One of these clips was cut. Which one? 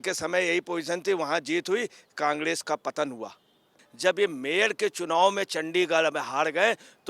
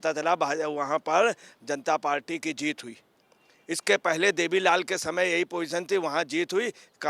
first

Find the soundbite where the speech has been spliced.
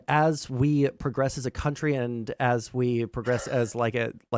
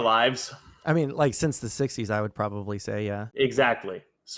second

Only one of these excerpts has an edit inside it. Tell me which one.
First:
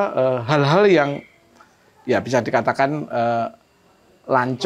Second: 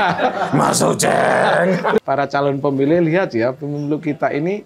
second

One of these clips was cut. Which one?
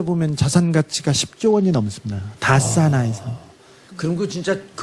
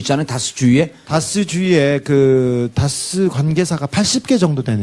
second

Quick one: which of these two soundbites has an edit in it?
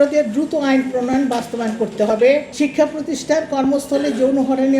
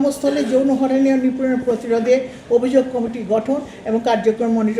first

